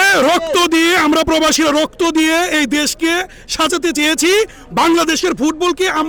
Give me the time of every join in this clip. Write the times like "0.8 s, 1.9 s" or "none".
none

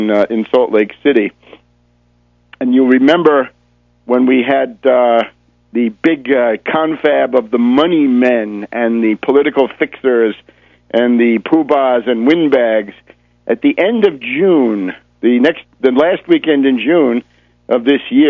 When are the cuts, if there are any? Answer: 7.7 s

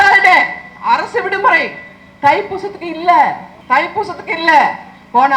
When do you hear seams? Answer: 3.5 s

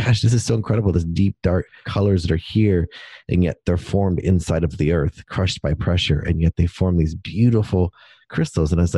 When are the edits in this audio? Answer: 1.8 s

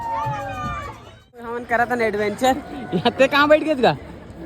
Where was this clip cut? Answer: 1.6 s

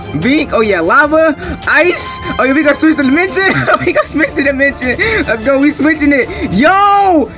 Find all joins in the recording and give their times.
none

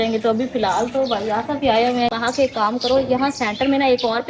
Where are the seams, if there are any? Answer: 2.1 s

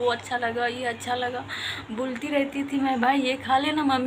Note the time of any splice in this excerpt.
none

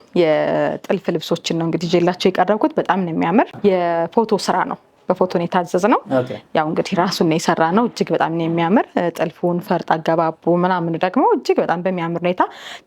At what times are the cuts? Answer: none

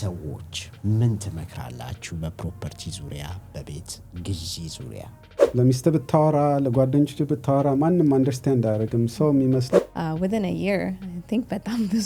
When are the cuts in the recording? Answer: 5.7 s, 9.7 s

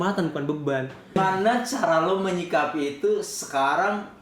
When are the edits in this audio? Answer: 1.2 s

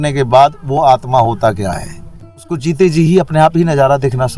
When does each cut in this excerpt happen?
2.5 s

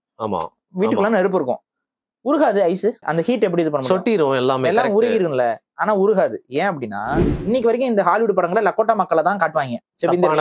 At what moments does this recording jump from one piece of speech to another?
3.0 s, 7.3 s

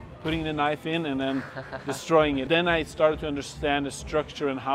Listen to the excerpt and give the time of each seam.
2.4 s

